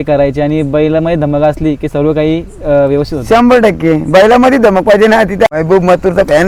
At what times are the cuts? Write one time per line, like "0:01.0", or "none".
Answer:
0:05.5